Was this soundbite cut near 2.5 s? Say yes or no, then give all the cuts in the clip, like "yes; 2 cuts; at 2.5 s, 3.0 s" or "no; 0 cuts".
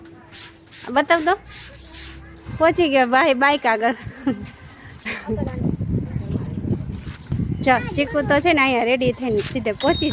yes; 1 cut; at 2.5 s